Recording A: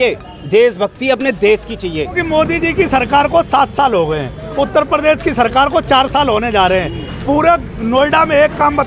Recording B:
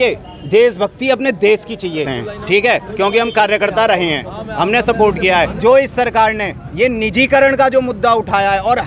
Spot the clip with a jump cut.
A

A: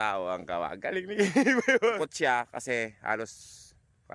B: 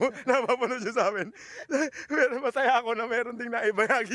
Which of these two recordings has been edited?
A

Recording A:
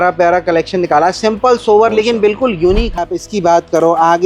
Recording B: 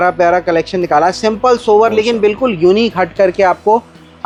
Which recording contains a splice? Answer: A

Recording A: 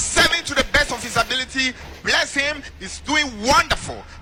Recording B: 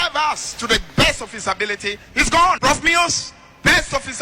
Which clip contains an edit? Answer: B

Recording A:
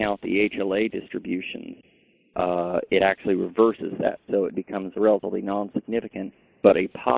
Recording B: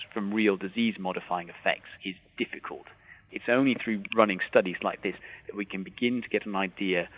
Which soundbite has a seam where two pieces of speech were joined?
B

